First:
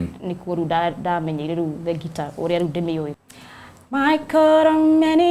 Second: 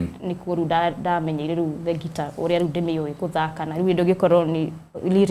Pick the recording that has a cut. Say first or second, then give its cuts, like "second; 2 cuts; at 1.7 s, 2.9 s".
first; 1 cut; at 3.1 s